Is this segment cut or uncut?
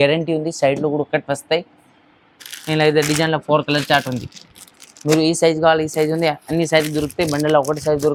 uncut